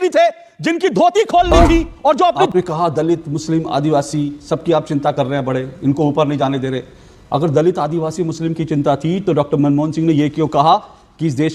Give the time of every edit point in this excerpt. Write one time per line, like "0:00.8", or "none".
0:02.4